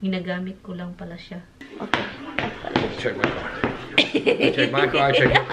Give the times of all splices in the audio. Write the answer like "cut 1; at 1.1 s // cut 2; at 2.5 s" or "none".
cut 1; at 1.6 s